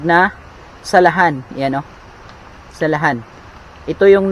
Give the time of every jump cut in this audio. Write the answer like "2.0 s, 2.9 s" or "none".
none

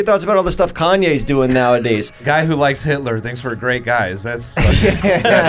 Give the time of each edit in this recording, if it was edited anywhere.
2.1 s

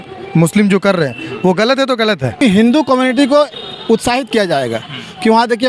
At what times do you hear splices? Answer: 2.4 s

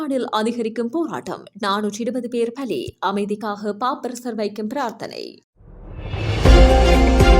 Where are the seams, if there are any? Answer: 5.2 s

